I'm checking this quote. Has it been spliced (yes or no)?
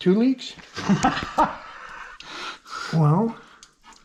no